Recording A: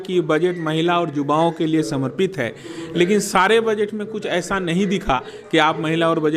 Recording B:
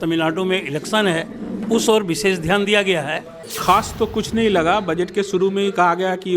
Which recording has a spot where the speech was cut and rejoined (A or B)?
B